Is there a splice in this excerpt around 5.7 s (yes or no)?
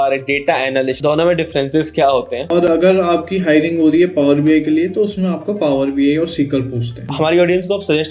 no